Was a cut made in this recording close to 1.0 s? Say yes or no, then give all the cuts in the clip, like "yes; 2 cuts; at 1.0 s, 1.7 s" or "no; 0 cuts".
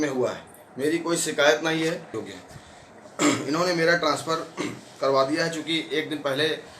no; 1 cut; at 2.3 s